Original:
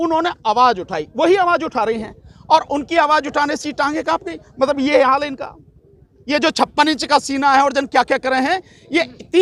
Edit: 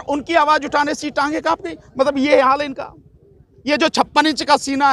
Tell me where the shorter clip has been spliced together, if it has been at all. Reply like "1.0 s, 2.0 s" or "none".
none